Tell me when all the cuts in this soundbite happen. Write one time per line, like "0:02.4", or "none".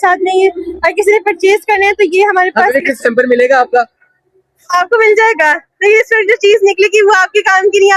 none